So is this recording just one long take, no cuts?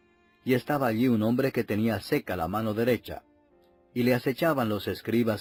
yes; 0 cuts

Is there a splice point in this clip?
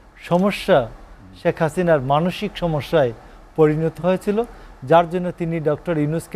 no; 0 cuts

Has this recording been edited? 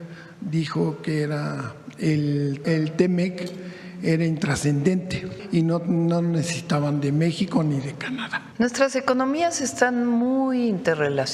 yes; 3 cuts; at 2.6 s, 5.3 s, 8.4 s

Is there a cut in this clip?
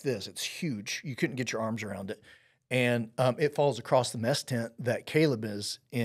no; 0 cuts

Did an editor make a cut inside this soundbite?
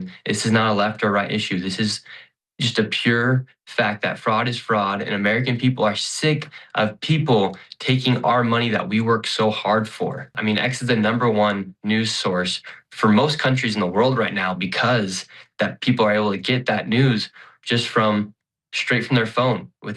yes; 1 cut; at 10.3 s

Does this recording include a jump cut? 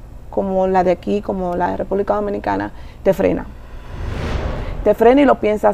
no; 0 cuts

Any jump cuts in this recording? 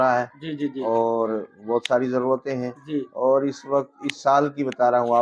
no; 0 cuts

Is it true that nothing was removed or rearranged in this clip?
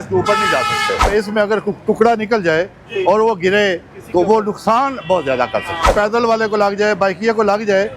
no; 2 cuts; at 1.1 s, 5.9 s

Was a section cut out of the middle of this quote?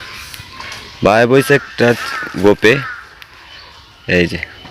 no; 0 cuts

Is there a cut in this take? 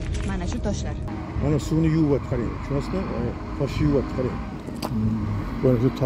yes; 1 cut; at 1.1 s

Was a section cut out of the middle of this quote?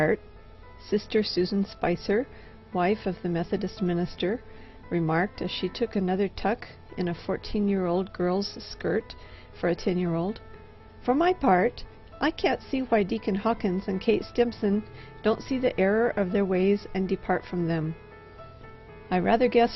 no; 0 cuts

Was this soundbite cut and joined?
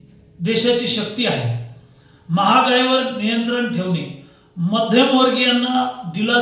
no; 0 cuts

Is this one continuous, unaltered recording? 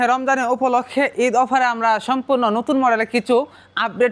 yes; 0 cuts

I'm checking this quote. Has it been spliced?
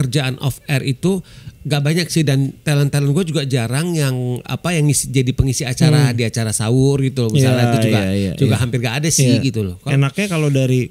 yes; 1 cut; at 9.8 s

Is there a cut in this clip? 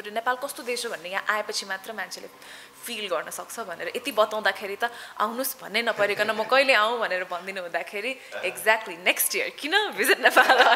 no; 0 cuts

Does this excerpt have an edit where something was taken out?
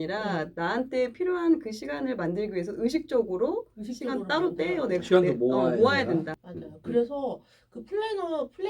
yes; 1 cut; at 6.3 s

